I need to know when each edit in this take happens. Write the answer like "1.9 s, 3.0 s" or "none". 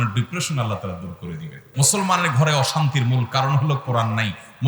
1.6 s

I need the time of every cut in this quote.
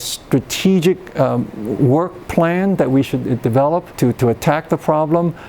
3.9 s

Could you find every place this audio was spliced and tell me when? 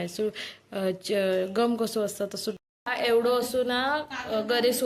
2.6 s

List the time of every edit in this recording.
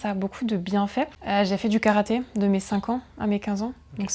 1.2 s

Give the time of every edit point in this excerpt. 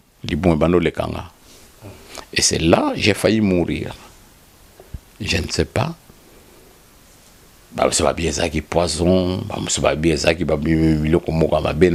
none

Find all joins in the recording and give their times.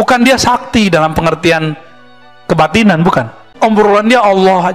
3.4 s

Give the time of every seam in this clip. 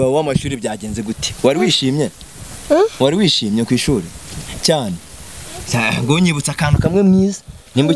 none

